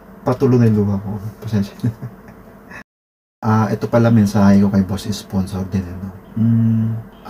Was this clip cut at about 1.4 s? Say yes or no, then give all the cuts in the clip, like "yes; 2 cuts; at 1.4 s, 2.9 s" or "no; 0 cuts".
no; 1 cut; at 3.0 s